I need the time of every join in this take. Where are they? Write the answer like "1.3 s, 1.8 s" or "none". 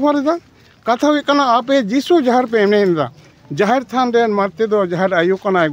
none